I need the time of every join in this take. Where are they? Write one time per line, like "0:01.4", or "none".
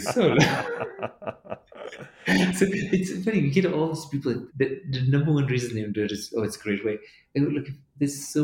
0:04.5